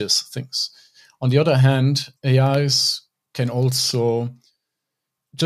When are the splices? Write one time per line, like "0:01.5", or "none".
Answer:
none